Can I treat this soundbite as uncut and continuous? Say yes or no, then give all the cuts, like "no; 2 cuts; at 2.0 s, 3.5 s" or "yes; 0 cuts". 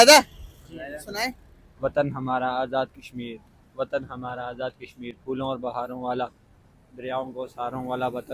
yes; 0 cuts